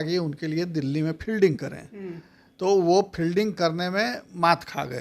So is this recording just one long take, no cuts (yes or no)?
yes